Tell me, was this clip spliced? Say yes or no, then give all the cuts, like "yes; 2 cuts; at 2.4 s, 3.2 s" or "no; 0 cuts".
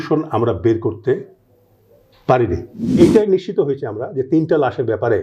yes; 1 cut; at 3.0 s